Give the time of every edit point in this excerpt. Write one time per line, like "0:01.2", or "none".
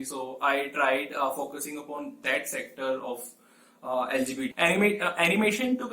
0:04.5